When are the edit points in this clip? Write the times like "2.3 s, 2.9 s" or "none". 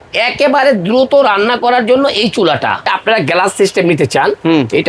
2.9 s